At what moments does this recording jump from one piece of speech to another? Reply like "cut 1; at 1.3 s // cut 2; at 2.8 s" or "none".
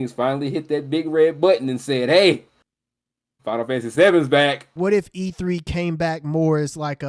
cut 1; at 4.6 s